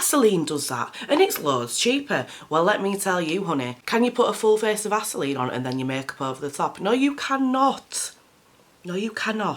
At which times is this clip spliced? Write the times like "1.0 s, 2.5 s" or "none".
none